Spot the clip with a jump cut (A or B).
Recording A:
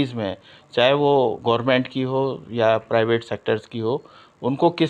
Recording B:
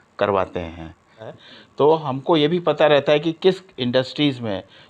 B